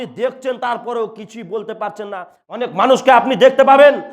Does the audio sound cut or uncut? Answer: cut